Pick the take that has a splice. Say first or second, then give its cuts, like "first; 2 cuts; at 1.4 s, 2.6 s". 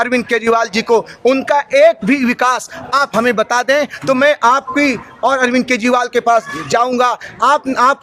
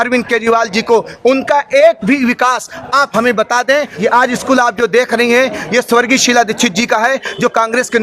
second; 1 cut; at 3.9 s